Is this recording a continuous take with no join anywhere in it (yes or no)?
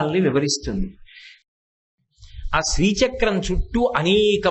no